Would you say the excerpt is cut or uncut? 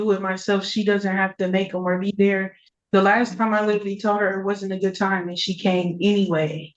uncut